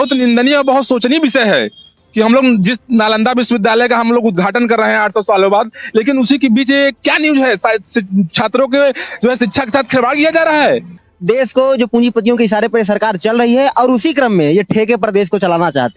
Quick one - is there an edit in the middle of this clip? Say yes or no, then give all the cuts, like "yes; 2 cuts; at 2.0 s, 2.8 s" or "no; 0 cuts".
yes; 1 cut; at 11.0 s